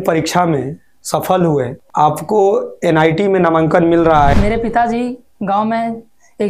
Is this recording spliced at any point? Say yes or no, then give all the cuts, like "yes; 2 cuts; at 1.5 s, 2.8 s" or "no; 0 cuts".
yes; 2 cuts; at 1.8 s, 4.3 s